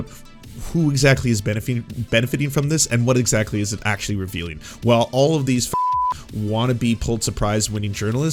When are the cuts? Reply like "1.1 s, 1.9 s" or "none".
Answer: none